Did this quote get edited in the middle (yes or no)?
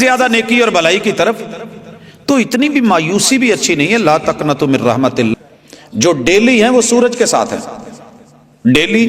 yes